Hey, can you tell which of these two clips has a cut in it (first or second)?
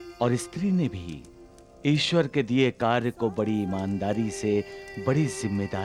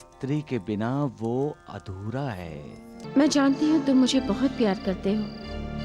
second